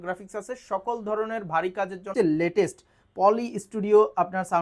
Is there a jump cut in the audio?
yes; 1 cut; at 2.1 s

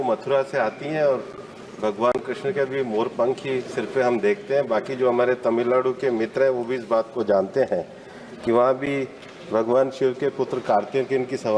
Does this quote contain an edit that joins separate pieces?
no; 0 cuts

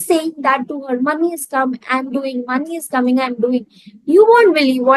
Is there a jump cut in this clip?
no; 0 cuts

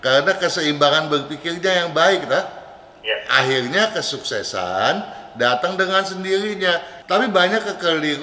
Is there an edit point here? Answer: yes; 1 cut; at 6.9 s

